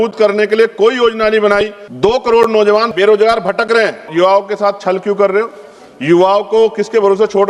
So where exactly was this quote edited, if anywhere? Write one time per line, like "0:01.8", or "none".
0:01.8
0:02.9
0:04.1